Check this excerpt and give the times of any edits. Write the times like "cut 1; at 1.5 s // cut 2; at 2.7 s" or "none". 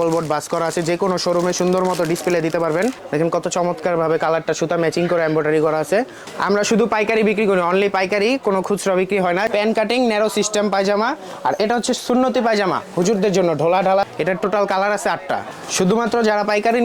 cut 1; at 3.0 s // cut 2; at 6.2 s // cut 3; at 9.5 s // cut 4; at 14.1 s // cut 5; at 15.5 s

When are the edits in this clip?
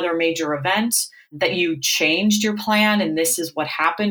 none

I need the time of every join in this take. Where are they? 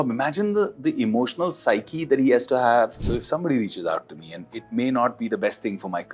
cut 1; at 3.0 s

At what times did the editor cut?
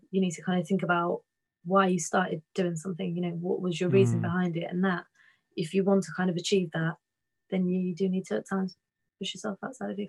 none

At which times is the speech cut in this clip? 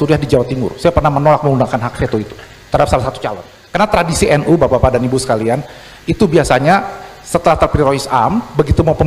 cut 1; at 3.5 s

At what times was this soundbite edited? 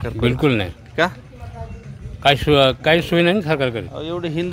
none

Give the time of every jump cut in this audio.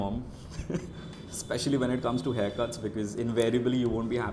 none

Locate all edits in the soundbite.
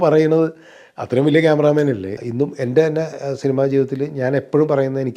cut 1; at 2.2 s

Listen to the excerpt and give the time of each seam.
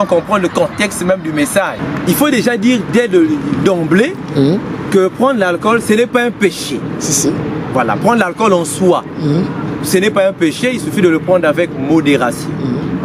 cut 1; at 1.8 s

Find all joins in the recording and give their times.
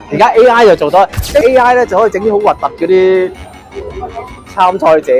cut 1; at 1.4 s

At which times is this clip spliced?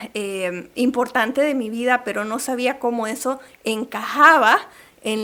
none

